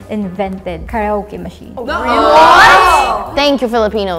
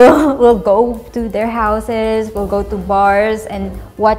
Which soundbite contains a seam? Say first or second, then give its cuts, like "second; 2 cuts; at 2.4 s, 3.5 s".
first; 3 cuts; at 0.8 s, 1.6 s, 3.3 s